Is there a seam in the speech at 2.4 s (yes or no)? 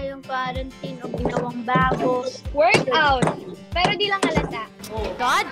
yes